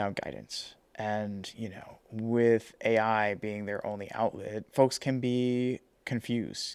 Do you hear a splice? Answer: no; 0 cuts

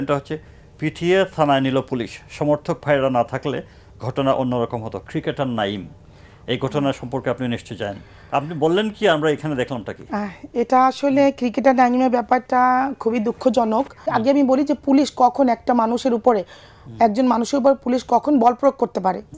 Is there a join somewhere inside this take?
yes; 1 cut; at 14.0 s

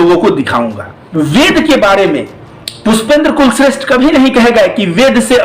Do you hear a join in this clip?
yes; 1 cut; at 1.0 s

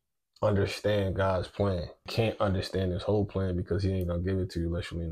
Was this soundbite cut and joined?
yes; 1 cut; at 2.1 s

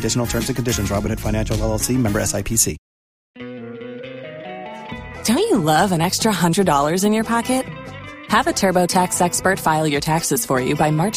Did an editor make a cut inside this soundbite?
yes; 1 cut; at 3.5 s

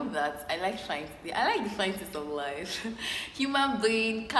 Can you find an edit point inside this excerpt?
no; 0 cuts

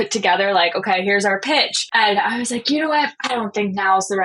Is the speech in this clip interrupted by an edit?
yes; 2 cuts; at 1.8 s, 3.2 s

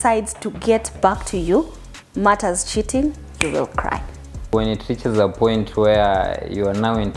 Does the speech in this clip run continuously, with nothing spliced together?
no; 1 cut; at 4.5 s

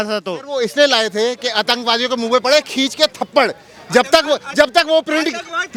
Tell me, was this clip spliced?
no; 0 cuts

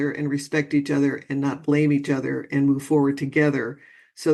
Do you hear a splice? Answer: no; 0 cuts

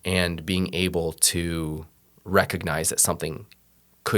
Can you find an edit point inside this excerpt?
no; 0 cuts

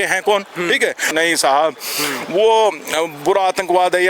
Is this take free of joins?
no; 1 cut; at 1.1 s

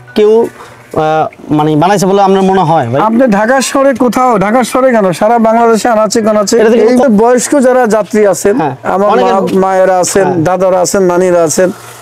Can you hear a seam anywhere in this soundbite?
yes; 1 cut; at 7.0 s

